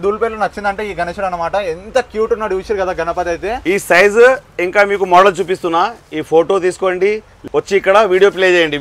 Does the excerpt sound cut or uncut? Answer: cut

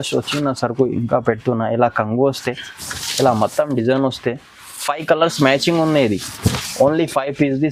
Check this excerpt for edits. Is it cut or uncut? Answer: uncut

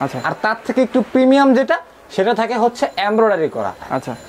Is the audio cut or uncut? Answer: uncut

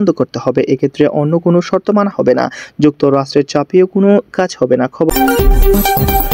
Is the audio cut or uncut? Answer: cut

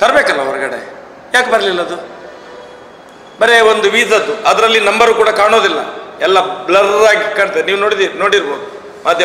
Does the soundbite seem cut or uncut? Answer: uncut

